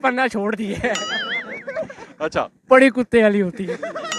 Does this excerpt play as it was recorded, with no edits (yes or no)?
yes